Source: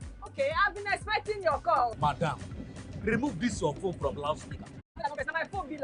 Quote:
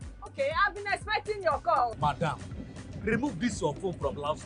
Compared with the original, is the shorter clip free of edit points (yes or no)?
yes